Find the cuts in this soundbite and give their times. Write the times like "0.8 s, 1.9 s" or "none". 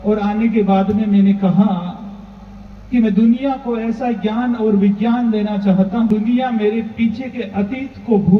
6.1 s